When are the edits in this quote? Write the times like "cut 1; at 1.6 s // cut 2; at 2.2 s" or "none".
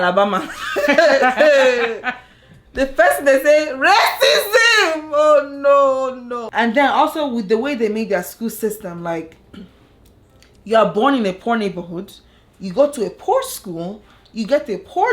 cut 1; at 6.3 s

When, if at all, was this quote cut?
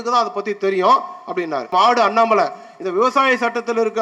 cut 1; at 1.7 s

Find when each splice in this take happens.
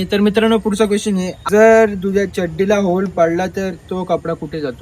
cut 1; at 1.3 s

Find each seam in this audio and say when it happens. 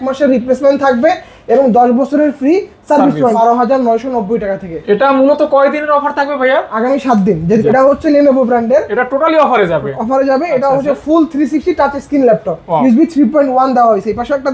cut 1; at 3.3 s // cut 2; at 7.6 s // cut 3; at 12.8 s

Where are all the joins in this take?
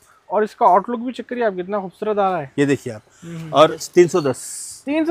cut 1; at 3.9 s

